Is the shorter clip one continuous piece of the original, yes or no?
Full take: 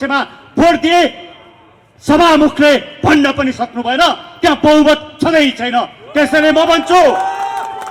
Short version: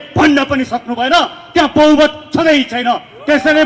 yes